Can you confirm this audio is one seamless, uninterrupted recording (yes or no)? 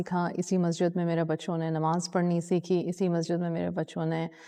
yes